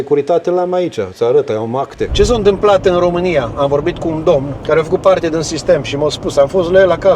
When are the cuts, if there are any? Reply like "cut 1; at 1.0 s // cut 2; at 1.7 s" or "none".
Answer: cut 1; at 2.0 s // cut 2; at 4.5 s